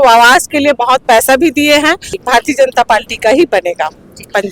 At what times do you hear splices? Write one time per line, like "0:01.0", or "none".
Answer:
0:02.2